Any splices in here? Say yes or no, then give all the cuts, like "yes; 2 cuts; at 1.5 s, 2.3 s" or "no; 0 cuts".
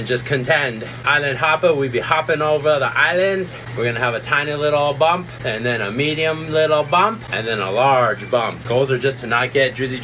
yes; 5 cuts; at 1.0 s, 3.6 s, 5.3 s, 7.3 s, 8.6 s